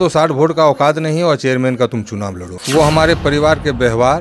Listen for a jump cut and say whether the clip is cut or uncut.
cut